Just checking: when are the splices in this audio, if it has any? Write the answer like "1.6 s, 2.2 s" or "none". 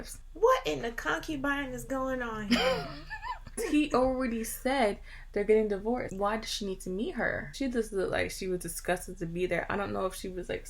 3.5 s, 6.1 s, 7.5 s